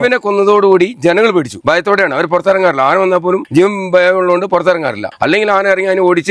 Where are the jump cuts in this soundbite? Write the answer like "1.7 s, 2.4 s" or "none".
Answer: 1.5 s, 3.4 s, 5.1 s